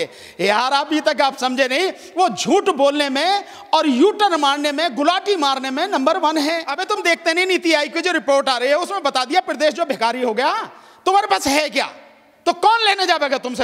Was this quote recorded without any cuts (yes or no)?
no